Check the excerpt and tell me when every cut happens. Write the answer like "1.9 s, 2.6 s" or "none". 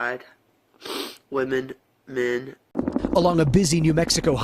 2.8 s